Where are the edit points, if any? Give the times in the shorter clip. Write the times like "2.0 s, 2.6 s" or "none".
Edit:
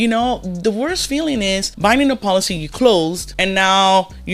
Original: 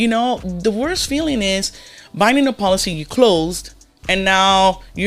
1.7 s, 3.3 s